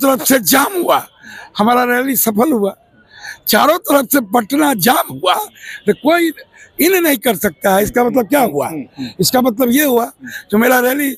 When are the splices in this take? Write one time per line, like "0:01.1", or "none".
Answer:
none